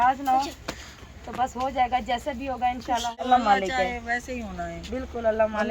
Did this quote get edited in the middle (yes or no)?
yes